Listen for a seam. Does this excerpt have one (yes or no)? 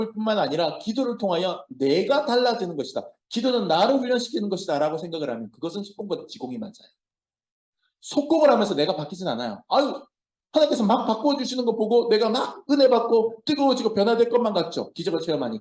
no